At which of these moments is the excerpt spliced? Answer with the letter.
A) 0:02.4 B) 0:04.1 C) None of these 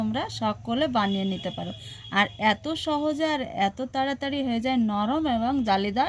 C